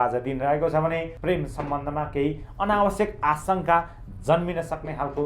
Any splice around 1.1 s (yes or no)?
yes